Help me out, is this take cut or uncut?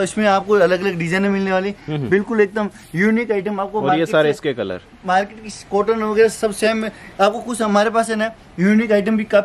uncut